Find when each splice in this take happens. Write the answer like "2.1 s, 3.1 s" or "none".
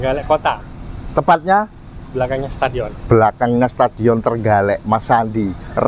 none